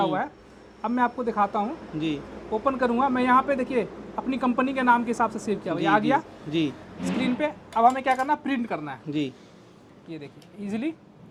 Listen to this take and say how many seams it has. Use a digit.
0